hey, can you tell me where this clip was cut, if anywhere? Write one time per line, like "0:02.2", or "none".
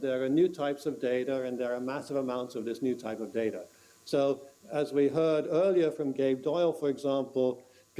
none

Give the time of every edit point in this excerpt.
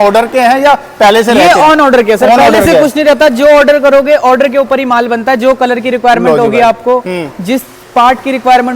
none

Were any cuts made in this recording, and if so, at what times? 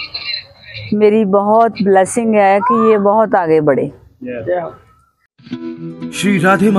0:05.3

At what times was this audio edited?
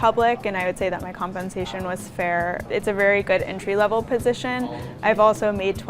0:02.6
0:04.9

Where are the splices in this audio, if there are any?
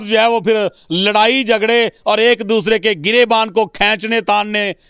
none

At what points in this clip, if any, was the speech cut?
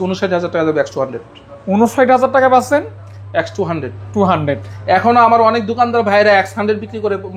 none

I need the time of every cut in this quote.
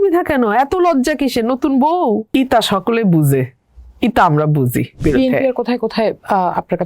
0:02.2
0:04.9

